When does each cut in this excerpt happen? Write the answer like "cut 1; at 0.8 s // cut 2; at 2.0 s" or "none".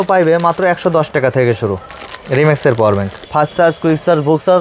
cut 1; at 3.2 s